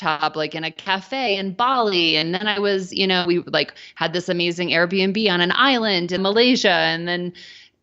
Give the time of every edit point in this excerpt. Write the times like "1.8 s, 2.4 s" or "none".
1.3 s, 6.2 s